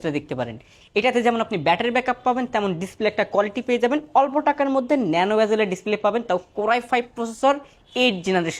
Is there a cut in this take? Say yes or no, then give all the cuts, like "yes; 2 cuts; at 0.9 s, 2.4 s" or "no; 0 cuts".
no; 0 cuts